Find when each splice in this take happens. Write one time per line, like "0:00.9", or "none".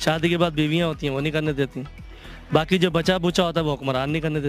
none